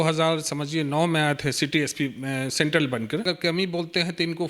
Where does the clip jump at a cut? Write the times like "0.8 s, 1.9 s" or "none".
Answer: 3.2 s